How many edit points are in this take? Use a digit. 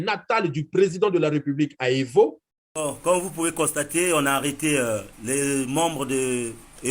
1